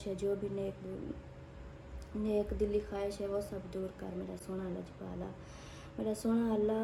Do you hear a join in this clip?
no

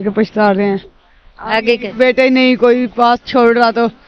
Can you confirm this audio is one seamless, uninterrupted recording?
yes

